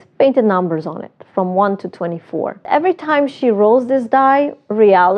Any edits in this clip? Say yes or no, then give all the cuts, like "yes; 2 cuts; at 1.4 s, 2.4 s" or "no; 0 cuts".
yes; 1 cut; at 2.6 s